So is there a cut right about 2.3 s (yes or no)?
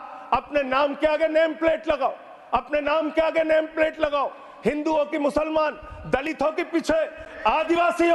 no